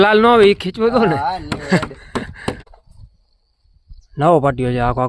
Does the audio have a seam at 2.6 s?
yes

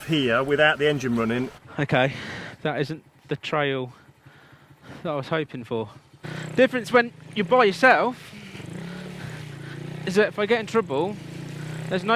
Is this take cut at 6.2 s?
yes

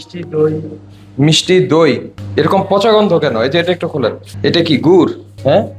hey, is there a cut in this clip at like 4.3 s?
yes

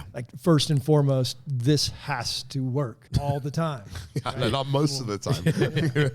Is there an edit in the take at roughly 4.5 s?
no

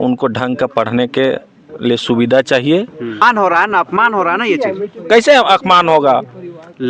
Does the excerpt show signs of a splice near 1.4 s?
no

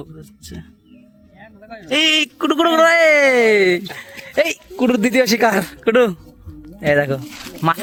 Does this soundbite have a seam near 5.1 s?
no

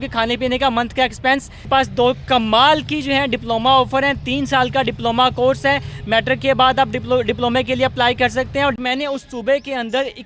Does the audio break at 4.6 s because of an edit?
no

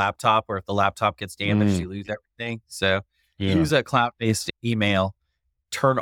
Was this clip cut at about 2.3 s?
no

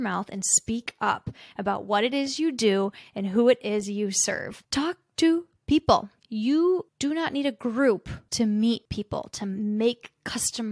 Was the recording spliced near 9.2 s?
yes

